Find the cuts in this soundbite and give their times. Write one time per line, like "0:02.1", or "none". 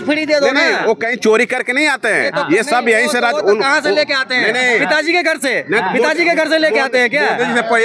none